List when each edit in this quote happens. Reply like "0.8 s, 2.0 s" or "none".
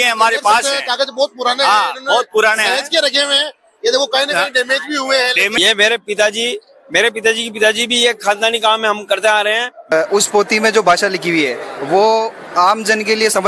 5.5 s, 9.9 s